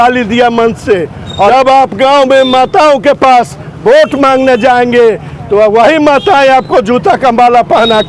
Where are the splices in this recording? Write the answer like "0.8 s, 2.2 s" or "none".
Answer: 1.5 s